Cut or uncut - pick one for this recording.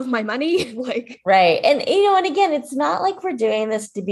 uncut